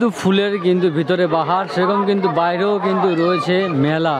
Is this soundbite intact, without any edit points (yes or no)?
yes